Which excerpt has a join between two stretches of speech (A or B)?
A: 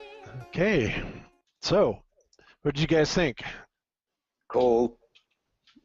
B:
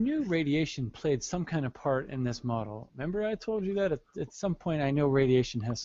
B